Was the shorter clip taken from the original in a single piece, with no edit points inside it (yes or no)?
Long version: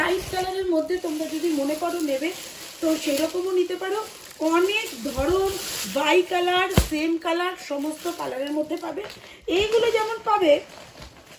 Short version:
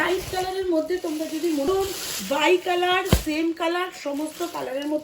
no